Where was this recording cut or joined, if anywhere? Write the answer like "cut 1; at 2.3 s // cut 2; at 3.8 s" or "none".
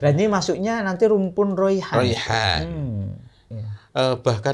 cut 1; at 3.5 s